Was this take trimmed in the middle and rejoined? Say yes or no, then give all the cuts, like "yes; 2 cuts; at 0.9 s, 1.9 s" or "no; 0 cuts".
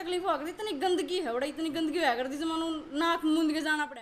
no; 0 cuts